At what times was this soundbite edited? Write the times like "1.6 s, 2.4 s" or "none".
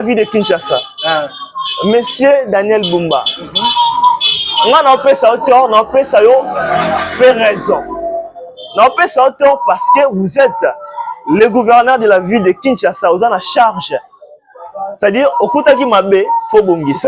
none